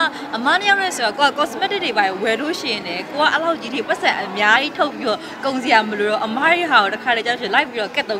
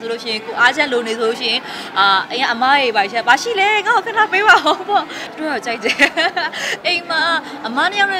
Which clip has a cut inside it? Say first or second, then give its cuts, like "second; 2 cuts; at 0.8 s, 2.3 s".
second; 1 cut; at 5.2 s